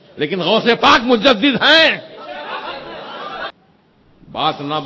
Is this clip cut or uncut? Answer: cut